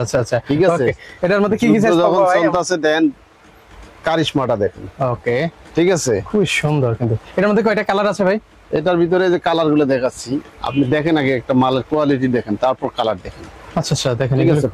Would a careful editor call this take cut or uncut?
uncut